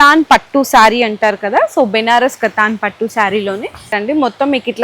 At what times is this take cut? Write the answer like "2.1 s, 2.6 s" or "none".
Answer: 3.9 s

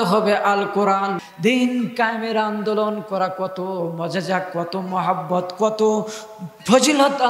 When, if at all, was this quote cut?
1.2 s

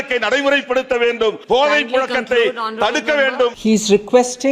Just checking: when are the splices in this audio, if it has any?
1.4 s, 3.6 s

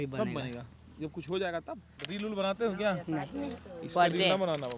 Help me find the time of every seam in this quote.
2.0 s

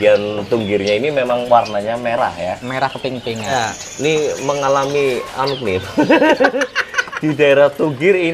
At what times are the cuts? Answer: 3.5 s

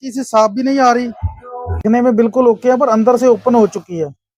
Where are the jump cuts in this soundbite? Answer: 1.8 s

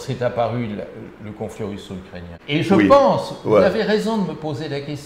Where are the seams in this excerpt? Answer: 2.3 s

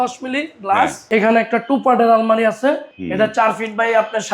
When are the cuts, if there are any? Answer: 1.0 s, 2.9 s

